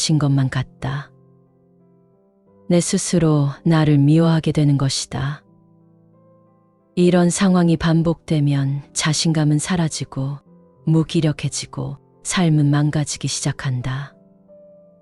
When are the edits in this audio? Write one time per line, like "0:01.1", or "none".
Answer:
0:01.1
0:02.7
0:05.4
0:06.9